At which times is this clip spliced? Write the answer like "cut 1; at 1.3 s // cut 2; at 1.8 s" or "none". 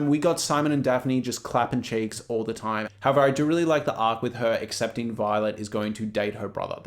cut 1; at 2.8 s